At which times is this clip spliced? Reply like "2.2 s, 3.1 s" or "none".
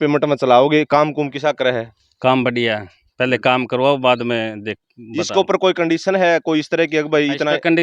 none